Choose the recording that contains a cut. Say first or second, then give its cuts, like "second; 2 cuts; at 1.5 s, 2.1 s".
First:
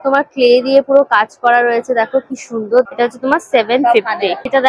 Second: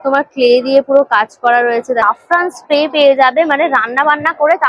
second; 1 cut; at 2.0 s